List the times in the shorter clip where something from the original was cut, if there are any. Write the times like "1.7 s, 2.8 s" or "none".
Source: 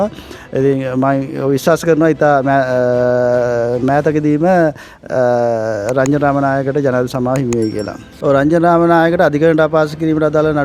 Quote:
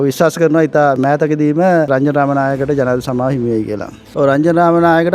1.0 s, 1.9 s